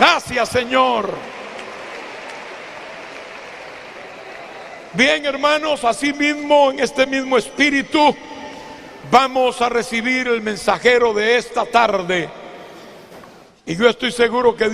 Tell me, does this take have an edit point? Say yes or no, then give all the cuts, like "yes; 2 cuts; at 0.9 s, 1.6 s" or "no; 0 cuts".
yes; 1 cut; at 1.2 s